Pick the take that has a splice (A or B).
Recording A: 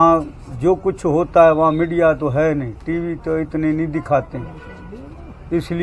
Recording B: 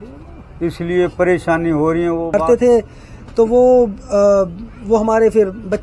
B